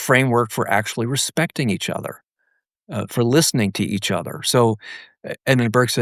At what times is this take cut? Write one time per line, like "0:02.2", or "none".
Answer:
none